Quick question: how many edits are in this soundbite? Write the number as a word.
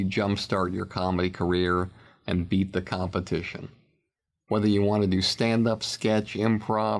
zero